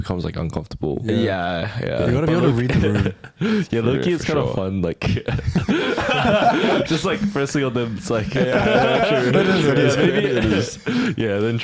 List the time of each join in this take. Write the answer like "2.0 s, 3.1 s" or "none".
none